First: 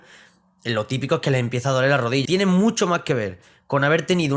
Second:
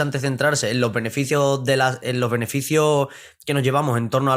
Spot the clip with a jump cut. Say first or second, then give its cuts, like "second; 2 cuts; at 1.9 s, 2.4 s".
first; 1 cut; at 2.2 s